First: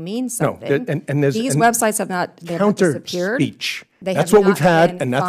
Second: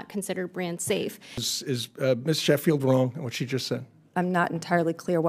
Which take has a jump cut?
second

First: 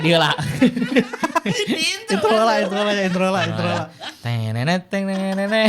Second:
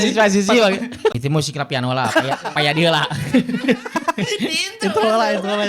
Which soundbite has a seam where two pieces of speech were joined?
second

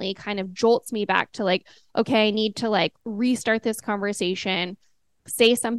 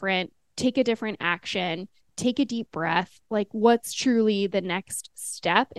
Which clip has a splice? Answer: first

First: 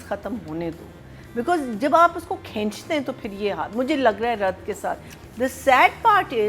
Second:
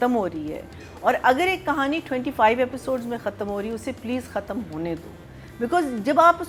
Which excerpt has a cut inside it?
first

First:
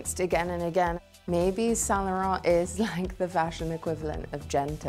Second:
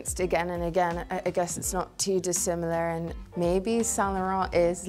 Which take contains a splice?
first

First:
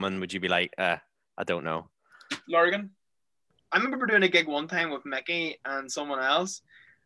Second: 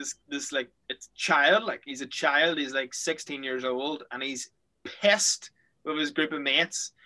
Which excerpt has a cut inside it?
first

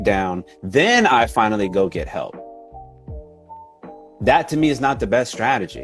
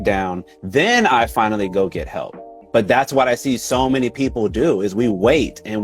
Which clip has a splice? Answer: second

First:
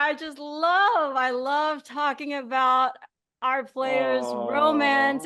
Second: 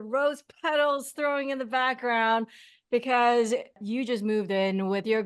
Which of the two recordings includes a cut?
second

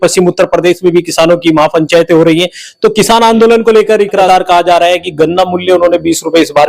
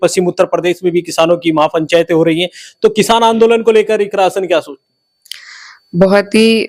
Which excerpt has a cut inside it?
first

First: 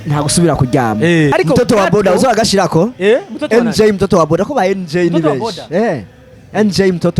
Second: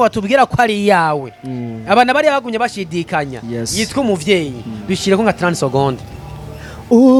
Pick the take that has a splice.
first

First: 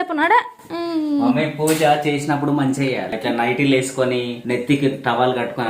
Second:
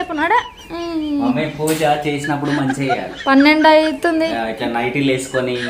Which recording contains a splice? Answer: first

